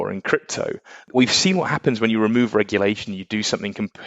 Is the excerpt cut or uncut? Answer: cut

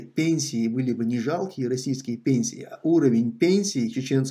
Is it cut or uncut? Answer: uncut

